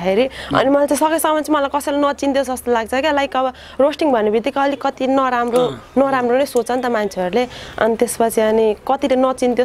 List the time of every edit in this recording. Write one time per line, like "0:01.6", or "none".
none